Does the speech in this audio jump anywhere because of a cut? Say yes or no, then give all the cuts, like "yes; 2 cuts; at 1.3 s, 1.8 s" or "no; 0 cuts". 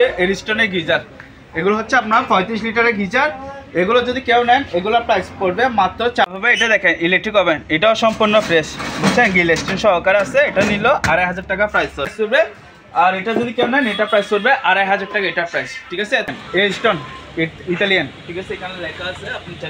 yes; 3 cuts; at 6.3 s, 12.1 s, 16.3 s